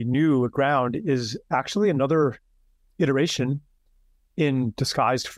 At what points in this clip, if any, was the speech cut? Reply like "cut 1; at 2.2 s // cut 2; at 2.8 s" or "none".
none